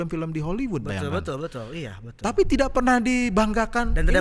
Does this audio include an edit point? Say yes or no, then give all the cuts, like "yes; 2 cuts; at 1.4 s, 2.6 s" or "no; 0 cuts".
no; 0 cuts